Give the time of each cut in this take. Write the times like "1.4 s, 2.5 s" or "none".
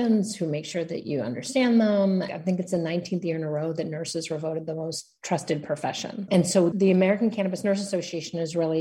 2.3 s, 6.6 s